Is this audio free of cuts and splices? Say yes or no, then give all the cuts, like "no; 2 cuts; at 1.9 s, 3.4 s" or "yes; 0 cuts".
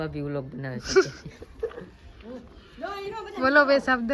yes; 0 cuts